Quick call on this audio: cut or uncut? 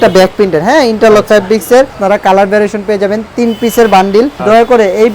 cut